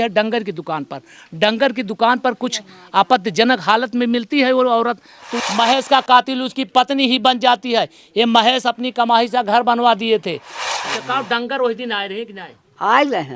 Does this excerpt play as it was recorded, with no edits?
no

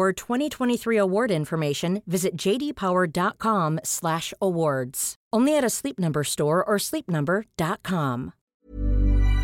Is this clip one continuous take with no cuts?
no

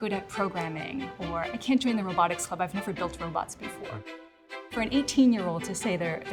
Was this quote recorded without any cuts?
yes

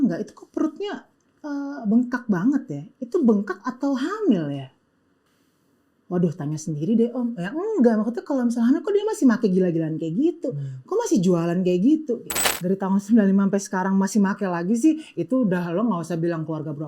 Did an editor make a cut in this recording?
yes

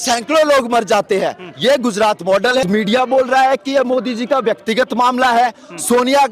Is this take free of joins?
no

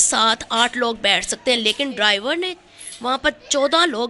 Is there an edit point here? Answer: no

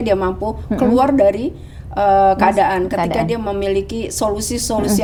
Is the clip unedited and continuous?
yes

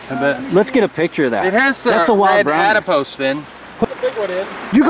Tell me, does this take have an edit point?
yes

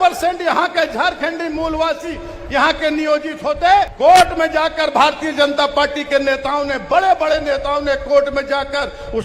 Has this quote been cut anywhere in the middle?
yes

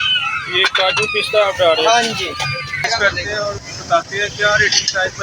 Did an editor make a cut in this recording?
yes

